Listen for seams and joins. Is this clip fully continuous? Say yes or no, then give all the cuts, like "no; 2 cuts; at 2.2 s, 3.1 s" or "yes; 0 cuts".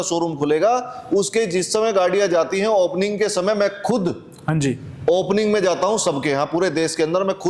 yes; 0 cuts